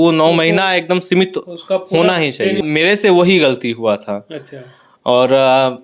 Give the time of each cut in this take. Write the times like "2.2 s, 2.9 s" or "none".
2.6 s